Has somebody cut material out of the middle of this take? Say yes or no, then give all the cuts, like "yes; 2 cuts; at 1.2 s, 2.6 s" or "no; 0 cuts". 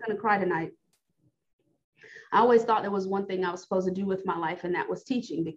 yes; 1 cut; at 1.0 s